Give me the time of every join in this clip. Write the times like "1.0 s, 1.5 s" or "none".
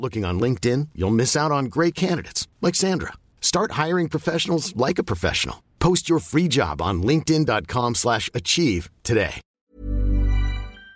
9.5 s